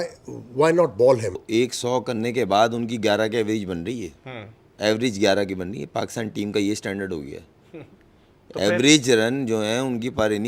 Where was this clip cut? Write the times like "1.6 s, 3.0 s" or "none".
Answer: 1.4 s